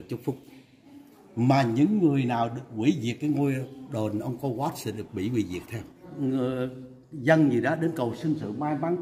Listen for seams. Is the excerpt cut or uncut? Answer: cut